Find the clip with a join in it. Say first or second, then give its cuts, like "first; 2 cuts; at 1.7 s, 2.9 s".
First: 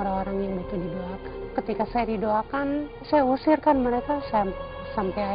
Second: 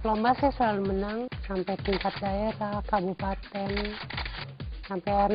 second; 1 cut; at 1.4 s